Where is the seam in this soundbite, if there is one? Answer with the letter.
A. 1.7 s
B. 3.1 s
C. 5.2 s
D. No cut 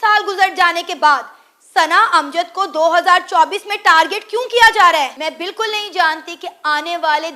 C